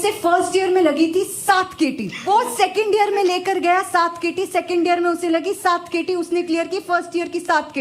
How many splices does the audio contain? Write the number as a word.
one